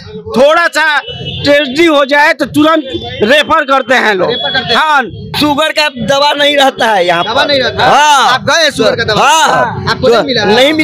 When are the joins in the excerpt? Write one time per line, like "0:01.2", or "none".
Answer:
0:05.3